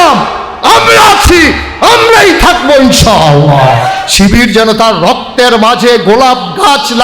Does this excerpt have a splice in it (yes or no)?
yes